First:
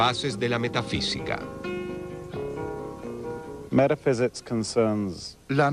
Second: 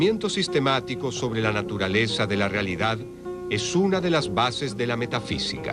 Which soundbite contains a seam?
second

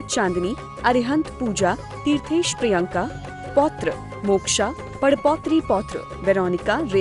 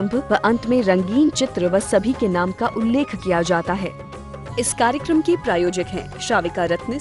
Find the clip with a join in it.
second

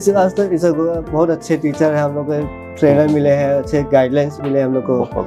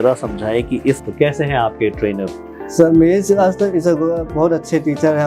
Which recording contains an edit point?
second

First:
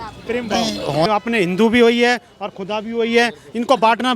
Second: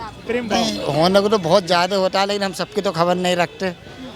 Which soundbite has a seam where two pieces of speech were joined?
first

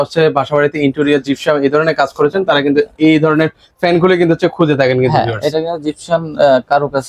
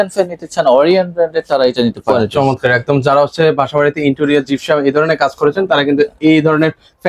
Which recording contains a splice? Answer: second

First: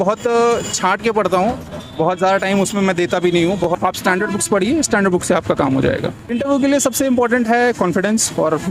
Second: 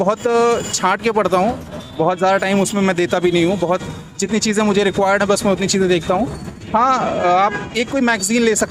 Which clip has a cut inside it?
first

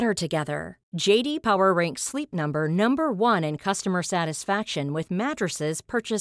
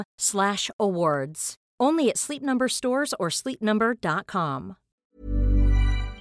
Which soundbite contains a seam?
second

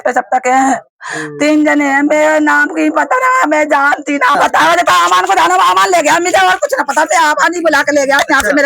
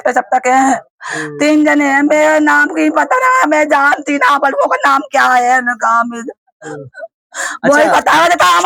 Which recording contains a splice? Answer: first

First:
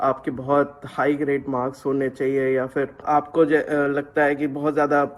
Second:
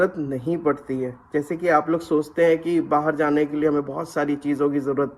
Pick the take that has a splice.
first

